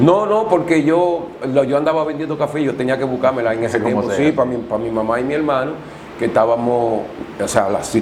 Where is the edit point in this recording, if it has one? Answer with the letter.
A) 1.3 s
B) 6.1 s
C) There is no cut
C